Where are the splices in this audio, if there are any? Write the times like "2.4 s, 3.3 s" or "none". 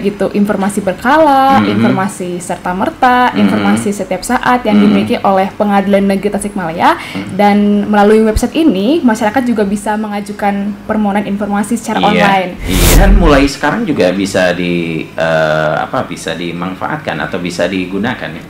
12.9 s